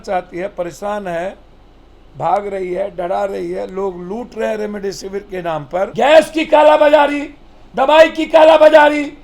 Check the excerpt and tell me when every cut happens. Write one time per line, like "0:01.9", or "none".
0:05.9